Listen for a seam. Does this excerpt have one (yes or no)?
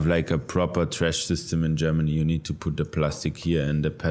no